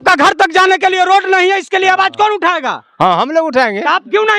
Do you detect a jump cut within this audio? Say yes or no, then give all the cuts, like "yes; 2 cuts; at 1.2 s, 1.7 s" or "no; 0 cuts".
no; 0 cuts